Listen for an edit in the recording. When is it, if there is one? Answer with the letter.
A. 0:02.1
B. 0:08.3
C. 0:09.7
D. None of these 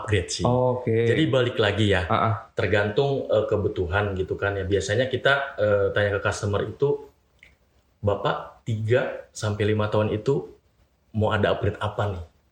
D